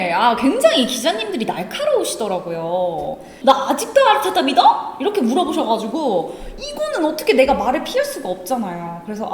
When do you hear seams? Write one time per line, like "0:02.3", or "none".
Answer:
0:03.3